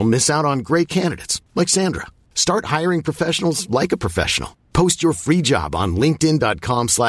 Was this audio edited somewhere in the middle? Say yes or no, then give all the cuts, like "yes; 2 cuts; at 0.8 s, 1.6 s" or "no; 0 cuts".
no; 0 cuts